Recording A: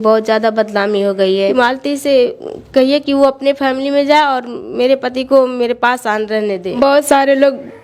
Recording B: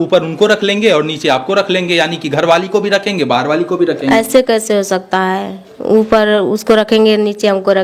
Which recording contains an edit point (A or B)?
A